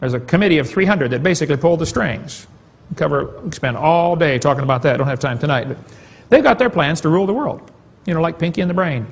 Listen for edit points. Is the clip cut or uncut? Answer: cut